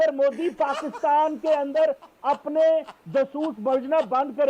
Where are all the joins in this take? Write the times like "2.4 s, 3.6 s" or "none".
none